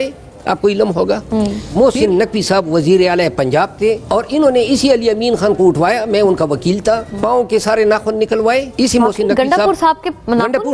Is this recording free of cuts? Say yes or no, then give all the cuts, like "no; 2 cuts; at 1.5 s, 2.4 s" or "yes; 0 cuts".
no; 4 cuts; at 1.6 s, 4.0 s, 7.1 s, 8.7 s